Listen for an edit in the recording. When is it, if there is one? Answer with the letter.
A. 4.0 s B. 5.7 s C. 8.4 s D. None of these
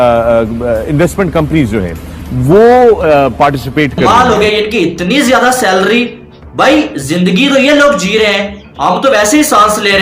A